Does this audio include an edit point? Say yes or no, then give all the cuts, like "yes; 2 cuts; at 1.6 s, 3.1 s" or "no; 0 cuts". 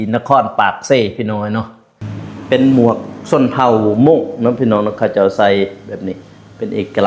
yes; 1 cut; at 2.1 s